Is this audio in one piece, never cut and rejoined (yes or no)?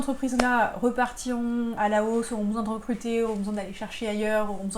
no